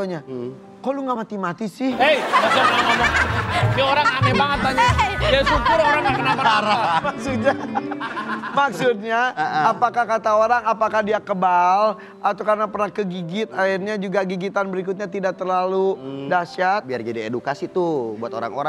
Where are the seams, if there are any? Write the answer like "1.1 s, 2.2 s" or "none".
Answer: 7.1 s, 16.9 s